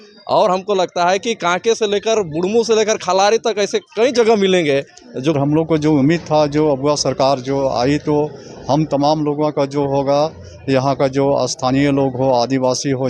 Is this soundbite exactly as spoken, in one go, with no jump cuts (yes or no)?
no